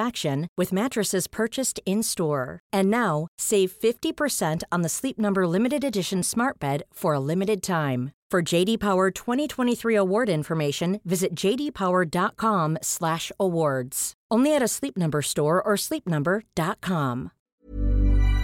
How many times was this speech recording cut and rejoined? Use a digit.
1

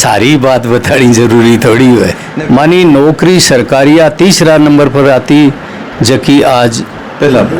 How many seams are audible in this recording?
1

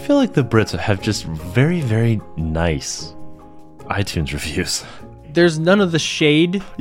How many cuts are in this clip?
1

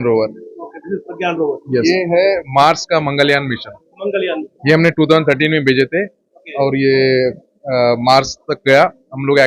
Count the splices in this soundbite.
1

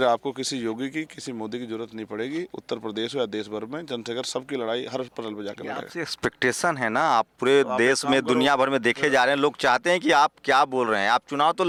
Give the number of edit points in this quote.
0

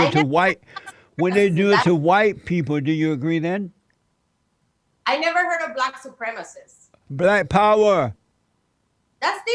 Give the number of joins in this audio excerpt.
0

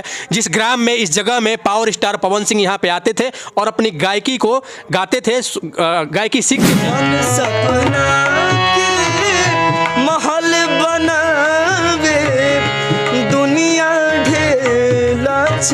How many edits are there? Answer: 1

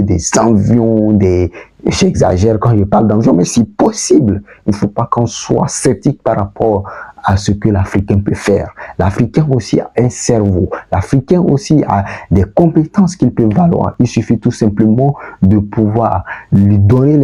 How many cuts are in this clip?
0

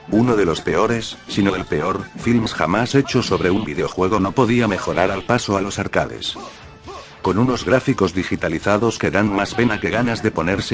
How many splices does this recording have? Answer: 1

